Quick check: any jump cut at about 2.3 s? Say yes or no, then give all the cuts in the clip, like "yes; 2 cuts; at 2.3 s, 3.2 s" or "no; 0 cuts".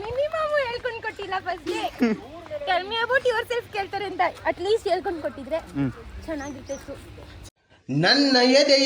no; 1 cut; at 7.4 s